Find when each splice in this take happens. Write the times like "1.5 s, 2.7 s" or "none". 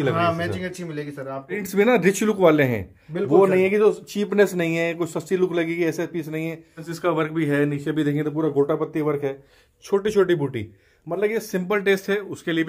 1.6 s, 6.9 s